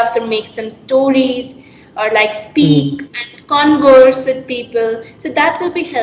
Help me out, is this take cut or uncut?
uncut